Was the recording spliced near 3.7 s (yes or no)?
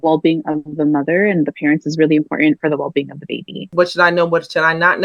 yes